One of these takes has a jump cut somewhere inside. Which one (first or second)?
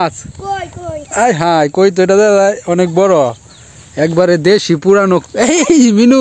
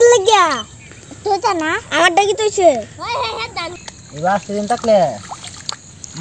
second